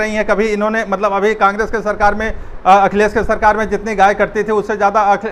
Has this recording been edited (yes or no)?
no